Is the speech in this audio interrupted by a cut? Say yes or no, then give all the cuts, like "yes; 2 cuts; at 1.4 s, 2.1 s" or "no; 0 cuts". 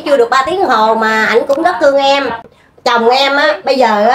yes; 1 cut; at 2.5 s